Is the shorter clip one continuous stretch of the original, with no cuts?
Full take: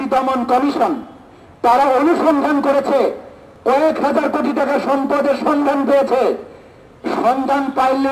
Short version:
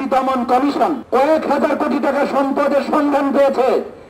no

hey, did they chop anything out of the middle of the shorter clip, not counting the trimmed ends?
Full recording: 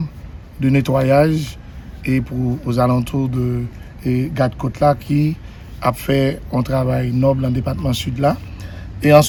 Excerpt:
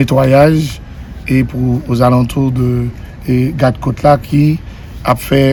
no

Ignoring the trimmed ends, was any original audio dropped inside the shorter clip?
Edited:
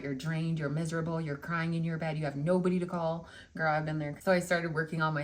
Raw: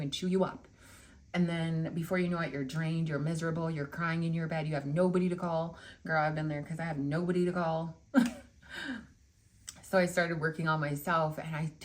yes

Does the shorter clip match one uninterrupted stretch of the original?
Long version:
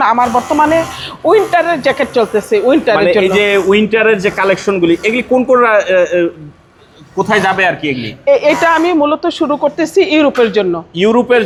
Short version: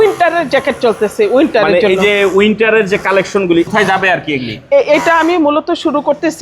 no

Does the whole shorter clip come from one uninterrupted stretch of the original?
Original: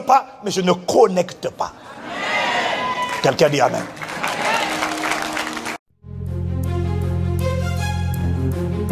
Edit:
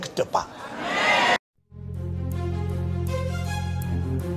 no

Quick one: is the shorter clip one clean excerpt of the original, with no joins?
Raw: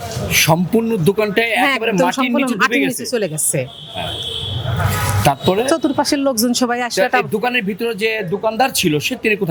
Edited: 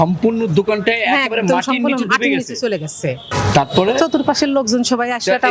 no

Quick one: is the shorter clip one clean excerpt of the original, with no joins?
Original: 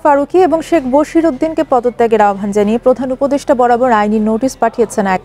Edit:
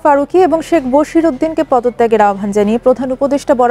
yes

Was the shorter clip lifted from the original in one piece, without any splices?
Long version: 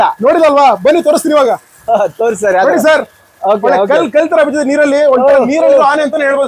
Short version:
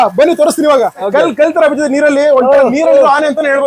no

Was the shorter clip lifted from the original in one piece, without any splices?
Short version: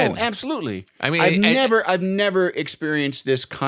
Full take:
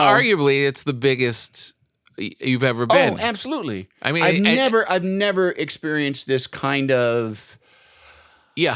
yes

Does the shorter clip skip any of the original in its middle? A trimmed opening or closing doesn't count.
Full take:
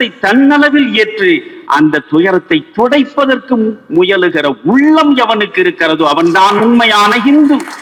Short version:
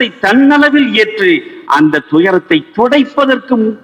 no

